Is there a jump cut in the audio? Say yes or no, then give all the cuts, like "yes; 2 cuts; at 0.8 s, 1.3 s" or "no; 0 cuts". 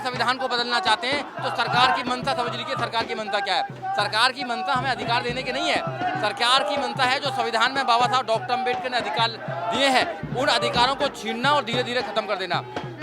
no; 0 cuts